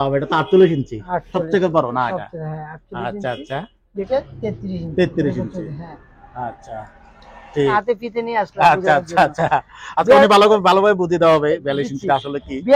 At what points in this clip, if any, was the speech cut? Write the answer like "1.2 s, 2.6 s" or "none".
4.1 s, 7.7 s